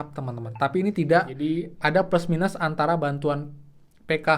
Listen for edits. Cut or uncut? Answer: cut